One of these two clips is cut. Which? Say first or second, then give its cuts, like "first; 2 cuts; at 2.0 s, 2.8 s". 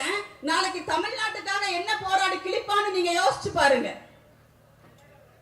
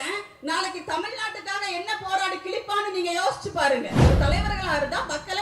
second; 1 cut; at 4.1 s